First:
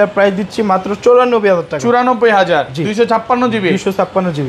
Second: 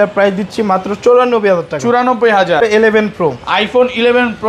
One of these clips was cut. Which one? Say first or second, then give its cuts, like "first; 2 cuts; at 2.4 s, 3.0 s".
second; 1 cut; at 2.6 s